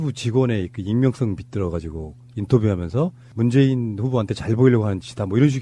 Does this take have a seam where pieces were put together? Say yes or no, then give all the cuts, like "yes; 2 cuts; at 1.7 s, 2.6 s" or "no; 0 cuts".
no; 0 cuts